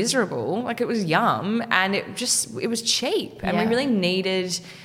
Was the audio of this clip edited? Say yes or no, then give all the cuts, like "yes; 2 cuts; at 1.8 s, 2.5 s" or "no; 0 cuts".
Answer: no; 0 cuts